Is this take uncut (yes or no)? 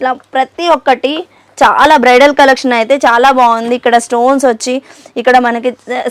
yes